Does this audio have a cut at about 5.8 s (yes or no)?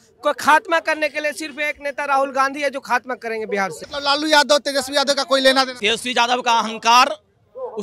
yes